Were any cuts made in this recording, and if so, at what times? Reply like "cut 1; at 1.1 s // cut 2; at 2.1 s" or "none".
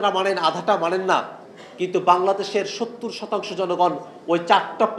none